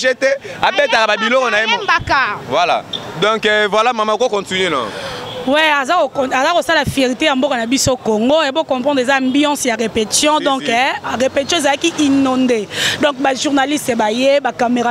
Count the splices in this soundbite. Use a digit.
0